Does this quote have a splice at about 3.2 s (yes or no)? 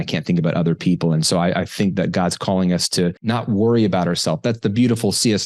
yes